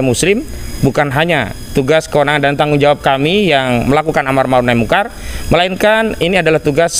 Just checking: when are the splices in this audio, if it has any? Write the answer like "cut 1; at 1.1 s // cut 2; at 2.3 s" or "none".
none